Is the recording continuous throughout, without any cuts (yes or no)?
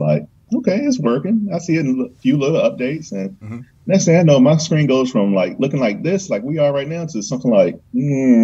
yes